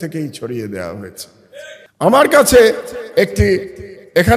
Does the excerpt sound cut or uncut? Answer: cut